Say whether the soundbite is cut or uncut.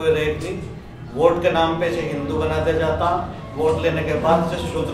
uncut